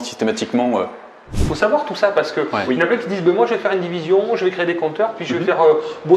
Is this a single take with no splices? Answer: no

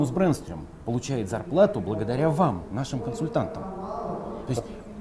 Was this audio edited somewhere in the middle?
no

